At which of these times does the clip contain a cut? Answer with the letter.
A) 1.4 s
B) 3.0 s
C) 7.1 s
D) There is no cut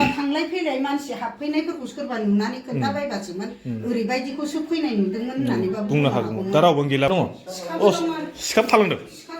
C